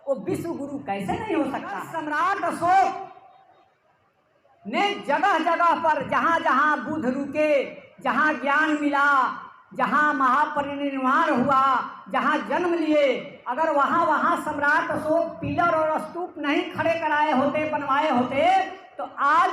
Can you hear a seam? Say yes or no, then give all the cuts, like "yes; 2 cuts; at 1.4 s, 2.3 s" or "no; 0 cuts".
yes; 1 cut; at 1.9 s